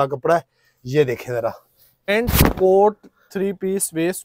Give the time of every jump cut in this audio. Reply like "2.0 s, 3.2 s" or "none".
2.1 s